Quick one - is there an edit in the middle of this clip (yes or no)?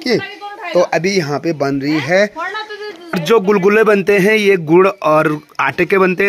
yes